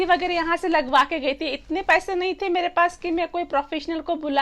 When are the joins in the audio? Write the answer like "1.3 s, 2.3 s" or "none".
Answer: none